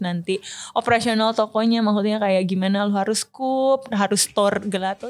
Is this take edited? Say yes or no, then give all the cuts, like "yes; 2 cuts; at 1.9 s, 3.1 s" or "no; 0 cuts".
no; 0 cuts